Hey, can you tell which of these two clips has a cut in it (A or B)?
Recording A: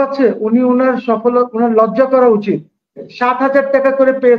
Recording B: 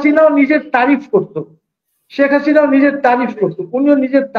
A